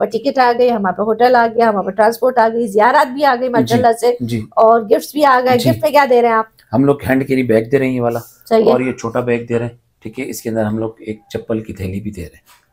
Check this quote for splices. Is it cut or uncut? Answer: uncut